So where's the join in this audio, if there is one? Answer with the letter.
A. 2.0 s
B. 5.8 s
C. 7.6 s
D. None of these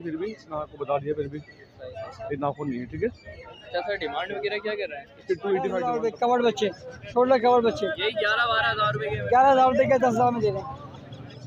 B